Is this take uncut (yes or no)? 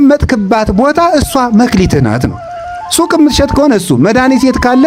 yes